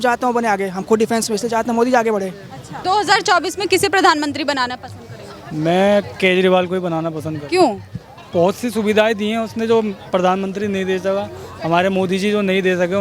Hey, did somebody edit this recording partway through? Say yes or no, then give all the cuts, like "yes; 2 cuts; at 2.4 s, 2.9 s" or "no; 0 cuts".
no; 0 cuts